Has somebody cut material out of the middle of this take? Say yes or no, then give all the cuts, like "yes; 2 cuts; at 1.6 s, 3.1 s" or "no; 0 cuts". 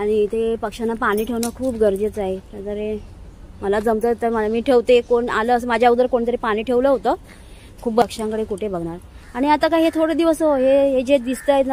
yes; 1 cut; at 8.0 s